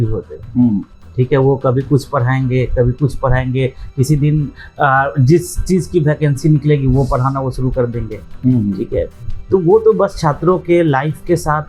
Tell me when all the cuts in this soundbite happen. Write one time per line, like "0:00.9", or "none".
none